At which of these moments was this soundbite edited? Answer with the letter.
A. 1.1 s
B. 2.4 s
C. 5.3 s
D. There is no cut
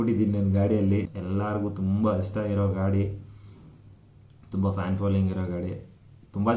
A